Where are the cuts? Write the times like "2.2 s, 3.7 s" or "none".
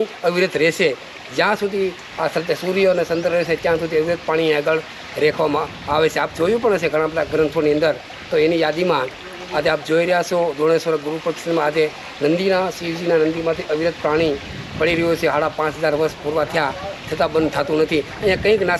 none